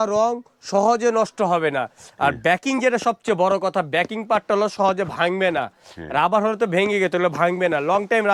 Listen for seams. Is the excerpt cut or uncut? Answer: uncut